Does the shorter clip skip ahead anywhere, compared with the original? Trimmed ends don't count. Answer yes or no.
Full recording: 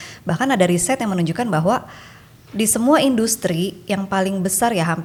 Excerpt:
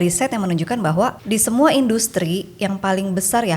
yes